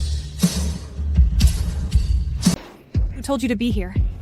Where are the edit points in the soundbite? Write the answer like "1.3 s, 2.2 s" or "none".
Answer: 2.5 s